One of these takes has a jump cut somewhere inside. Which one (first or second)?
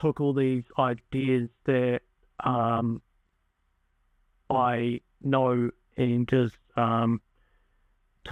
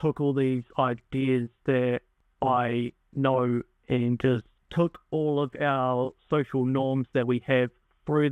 second